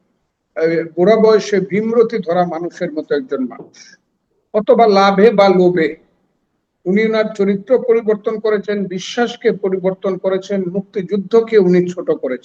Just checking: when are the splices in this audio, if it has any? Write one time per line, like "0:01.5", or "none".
none

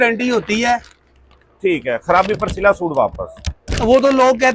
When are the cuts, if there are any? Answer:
none

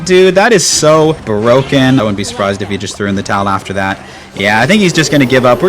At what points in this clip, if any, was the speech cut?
0:01.2
0:02.0

